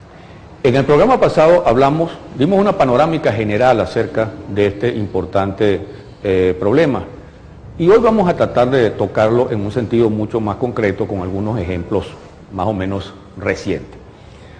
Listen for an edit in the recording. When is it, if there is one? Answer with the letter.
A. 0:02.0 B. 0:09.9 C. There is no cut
A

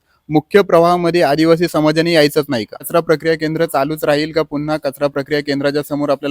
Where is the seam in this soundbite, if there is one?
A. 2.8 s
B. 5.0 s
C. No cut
A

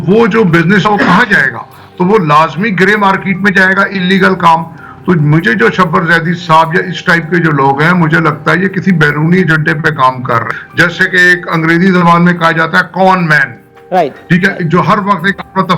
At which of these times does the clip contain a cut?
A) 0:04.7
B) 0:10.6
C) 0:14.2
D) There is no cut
B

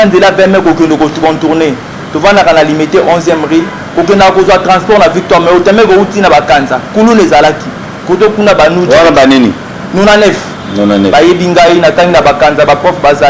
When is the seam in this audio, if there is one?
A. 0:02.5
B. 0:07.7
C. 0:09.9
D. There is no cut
D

